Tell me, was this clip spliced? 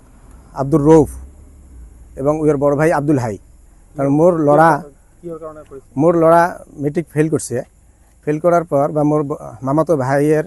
no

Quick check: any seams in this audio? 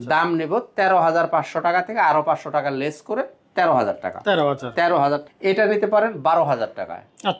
yes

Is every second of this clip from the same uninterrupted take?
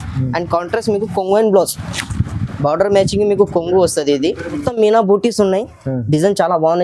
no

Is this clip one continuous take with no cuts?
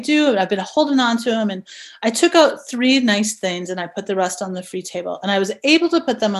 yes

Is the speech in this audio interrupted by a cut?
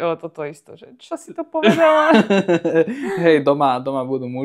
no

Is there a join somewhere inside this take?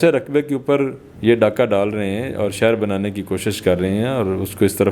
yes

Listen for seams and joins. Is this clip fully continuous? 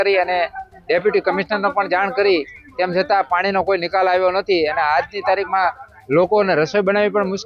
yes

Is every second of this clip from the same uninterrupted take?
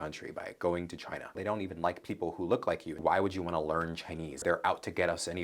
no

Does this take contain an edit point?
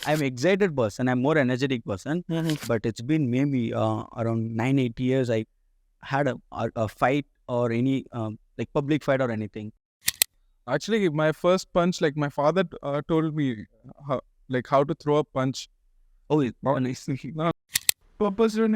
yes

